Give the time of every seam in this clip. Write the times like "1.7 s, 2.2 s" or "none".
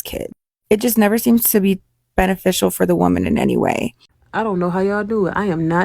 4.3 s